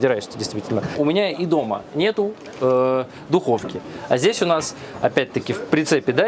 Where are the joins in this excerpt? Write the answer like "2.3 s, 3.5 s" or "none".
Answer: 0.9 s

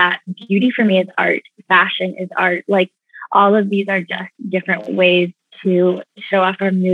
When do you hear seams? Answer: none

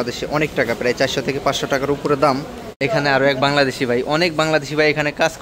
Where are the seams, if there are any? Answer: 2.6 s

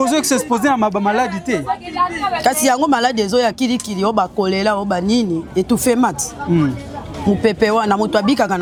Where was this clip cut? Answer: none

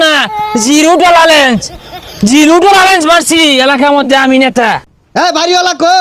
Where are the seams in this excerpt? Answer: 4.9 s

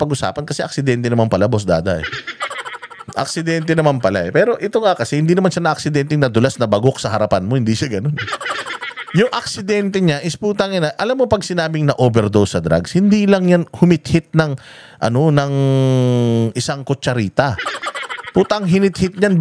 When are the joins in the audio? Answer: none

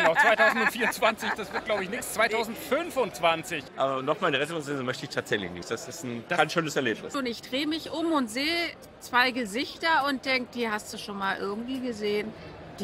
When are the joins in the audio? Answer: 3.6 s, 7.1 s

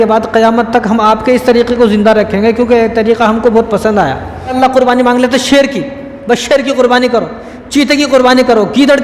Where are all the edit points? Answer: 4.6 s

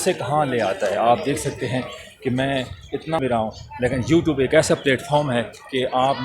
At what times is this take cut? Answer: 3.2 s

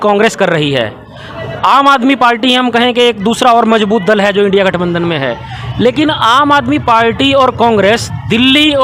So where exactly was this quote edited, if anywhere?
none

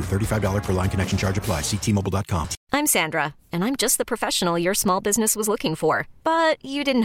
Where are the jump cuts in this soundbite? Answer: 2.6 s

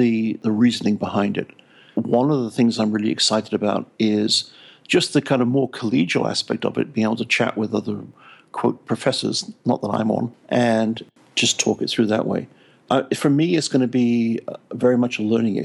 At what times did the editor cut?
1.9 s, 12.8 s

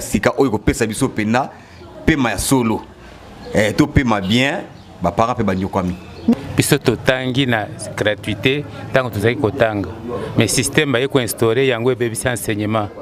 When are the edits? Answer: 6.3 s

